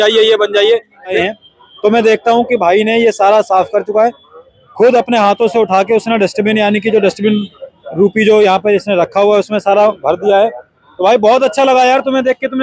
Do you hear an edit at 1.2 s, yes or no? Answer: yes